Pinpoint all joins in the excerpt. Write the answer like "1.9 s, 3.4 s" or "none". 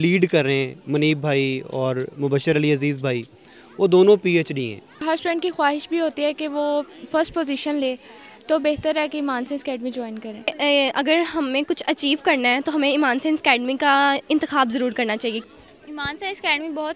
5.0 s, 10.5 s, 15.4 s